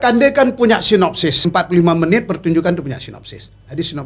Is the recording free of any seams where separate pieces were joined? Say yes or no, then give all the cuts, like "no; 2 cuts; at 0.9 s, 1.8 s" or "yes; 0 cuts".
no; 1 cut; at 1.5 s